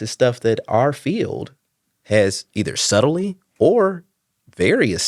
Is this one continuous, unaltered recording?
yes; 0 cuts

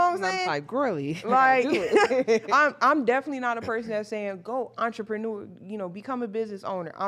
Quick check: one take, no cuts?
yes; 0 cuts

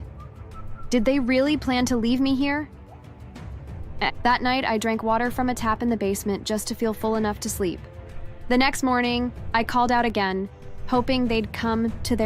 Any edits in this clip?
no; 0 cuts

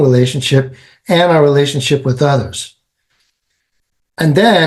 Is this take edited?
no; 0 cuts

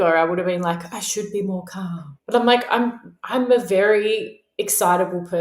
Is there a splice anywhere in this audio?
yes; 1 cut; at 2.1 s

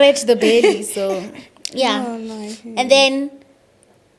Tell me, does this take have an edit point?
no; 0 cuts

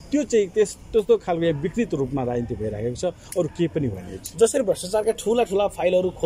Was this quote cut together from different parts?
no; 0 cuts

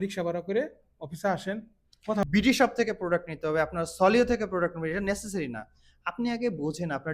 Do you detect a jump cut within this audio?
yes; 1 cut; at 2.2 s

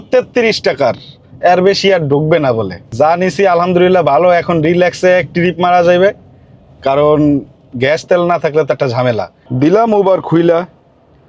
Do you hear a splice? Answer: no; 0 cuts

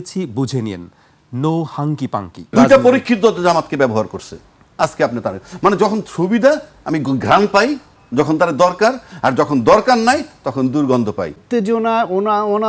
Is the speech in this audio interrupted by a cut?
yes; 2 cuts; at 2.5 s, 11.4 s

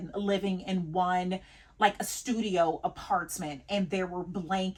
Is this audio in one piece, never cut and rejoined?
yes; 0 cuts

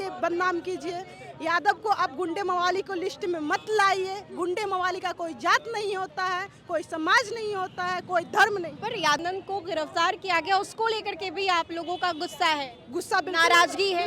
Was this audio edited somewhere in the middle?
yes; 1 cut; at 9.2 s

